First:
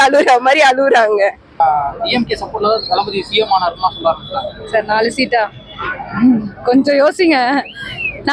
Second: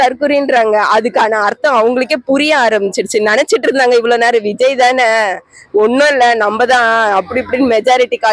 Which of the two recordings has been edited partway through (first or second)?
first